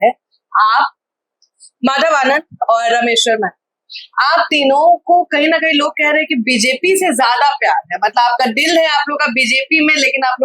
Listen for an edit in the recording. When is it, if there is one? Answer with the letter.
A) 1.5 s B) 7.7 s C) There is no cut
A